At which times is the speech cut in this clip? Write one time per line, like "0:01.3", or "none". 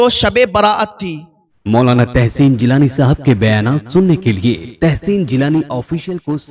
0:01.6